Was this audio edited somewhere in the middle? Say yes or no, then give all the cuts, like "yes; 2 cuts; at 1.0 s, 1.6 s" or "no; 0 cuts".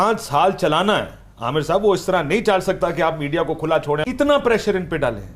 yes; 1 cut; at 4.0 s